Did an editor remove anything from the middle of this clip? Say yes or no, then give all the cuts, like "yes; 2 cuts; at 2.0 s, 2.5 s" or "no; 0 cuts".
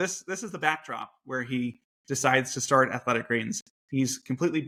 no; 0 cuts